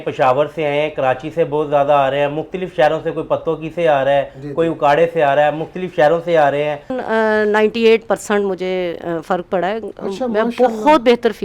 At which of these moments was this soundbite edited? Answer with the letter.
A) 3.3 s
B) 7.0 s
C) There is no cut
B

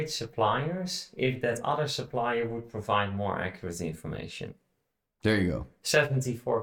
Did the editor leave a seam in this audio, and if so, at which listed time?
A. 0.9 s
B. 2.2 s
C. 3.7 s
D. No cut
D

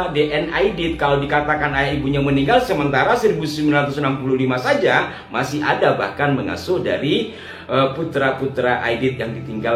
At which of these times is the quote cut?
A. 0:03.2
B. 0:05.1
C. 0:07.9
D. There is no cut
D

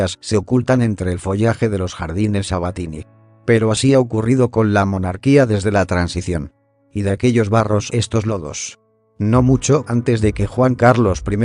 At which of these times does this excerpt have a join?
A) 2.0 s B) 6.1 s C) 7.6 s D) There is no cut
A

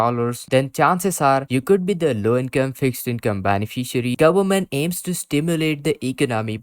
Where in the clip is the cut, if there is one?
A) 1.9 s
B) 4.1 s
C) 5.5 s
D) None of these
B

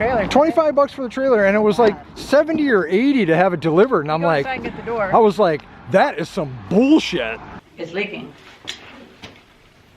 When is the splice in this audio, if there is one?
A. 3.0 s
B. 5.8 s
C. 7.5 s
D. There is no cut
C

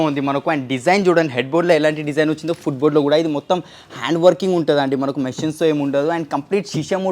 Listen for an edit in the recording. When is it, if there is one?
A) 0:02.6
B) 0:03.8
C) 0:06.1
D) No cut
D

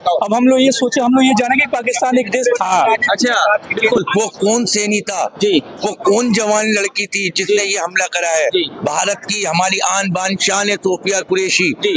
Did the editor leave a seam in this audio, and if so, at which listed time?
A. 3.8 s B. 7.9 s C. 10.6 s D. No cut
A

